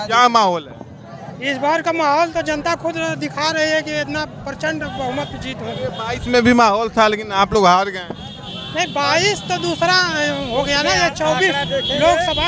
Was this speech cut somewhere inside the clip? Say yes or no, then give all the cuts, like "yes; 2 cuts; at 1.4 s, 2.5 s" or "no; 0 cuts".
no; 0 cuts